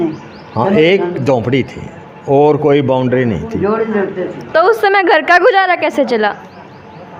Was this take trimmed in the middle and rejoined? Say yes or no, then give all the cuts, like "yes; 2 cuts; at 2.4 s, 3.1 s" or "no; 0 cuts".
no; 0 cuts